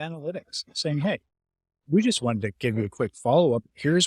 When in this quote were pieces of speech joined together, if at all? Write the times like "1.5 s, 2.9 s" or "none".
none